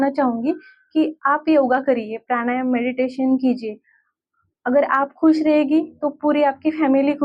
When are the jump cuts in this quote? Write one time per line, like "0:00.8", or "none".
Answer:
none